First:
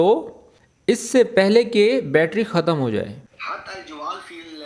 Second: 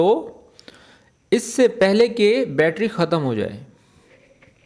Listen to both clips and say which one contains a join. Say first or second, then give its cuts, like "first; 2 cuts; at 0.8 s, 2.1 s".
first; 2 cuts; at 1.0 s, 3.3 s